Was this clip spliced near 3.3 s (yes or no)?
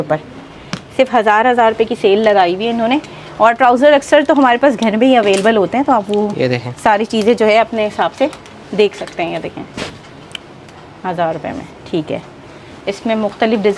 no